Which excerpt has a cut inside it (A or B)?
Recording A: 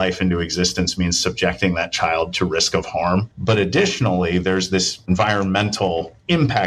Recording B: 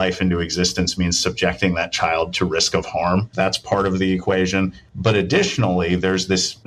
A